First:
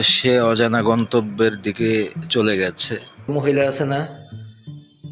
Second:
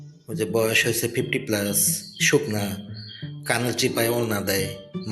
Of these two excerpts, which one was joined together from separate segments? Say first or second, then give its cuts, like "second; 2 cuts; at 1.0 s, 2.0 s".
first; 1 cut; at 3.3 s